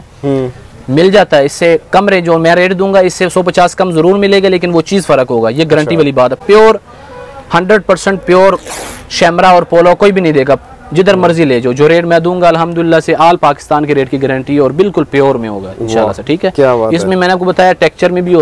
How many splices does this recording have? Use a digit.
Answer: 0